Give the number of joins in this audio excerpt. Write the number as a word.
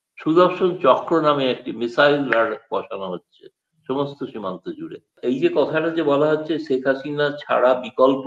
one